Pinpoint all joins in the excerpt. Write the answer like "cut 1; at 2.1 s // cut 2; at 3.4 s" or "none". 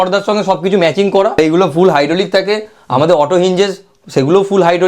cut 1; at 1.4 s